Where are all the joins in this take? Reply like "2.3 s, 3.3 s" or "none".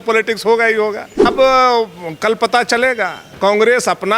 1.2 s

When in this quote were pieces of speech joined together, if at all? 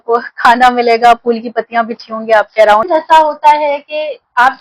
2.9 s

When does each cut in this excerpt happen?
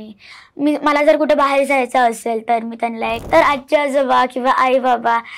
3.3 s

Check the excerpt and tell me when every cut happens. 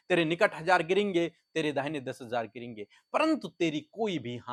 none

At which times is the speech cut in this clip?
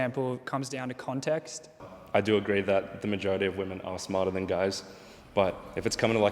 1.9 s

